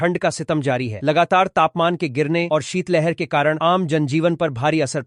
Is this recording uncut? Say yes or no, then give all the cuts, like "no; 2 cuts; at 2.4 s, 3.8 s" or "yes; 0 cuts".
yes; 0 cuts